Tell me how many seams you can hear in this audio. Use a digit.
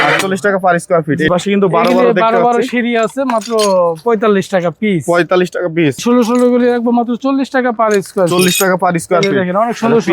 2